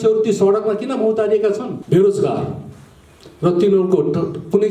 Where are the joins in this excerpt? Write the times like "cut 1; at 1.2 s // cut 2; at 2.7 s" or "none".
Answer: cut 1; at 1.7 s